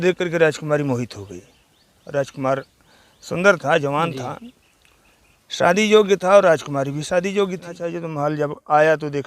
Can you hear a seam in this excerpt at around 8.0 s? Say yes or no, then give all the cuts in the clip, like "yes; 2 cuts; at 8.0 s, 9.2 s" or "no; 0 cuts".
yes; 1 cut; at 8.0 s